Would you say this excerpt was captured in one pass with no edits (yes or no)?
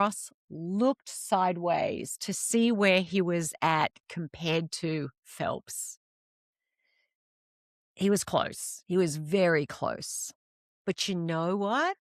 yes